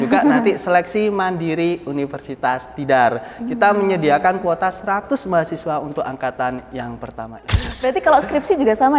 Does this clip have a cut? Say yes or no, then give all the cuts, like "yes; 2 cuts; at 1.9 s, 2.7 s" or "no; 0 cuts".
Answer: yes; 1 cut; at 7.7 s